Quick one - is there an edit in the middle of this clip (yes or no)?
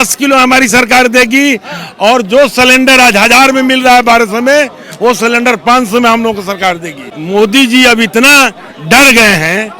yes